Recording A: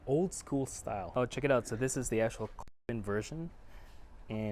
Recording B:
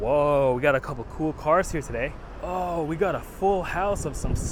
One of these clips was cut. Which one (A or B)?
A